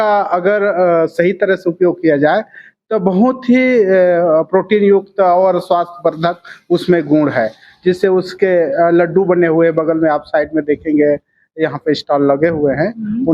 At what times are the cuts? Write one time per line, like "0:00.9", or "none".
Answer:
none